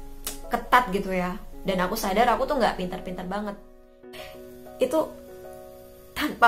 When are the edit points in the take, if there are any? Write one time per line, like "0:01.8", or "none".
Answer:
0:04.1